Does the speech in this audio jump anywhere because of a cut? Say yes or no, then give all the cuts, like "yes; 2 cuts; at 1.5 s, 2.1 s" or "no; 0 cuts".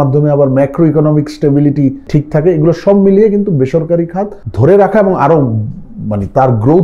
yes; 2 cuts; at 2.0 s, 4.4 s